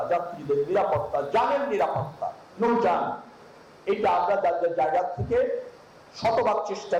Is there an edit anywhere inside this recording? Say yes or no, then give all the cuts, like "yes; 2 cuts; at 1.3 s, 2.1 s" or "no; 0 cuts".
no; 0 cuts